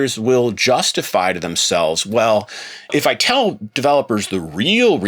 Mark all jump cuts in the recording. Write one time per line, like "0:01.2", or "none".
0:02.9